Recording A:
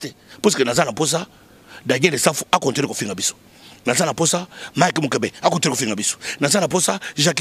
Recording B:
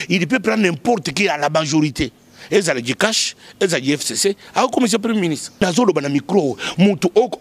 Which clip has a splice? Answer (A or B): B